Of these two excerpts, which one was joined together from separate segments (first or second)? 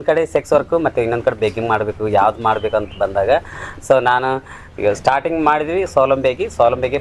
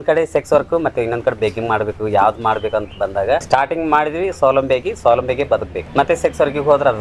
second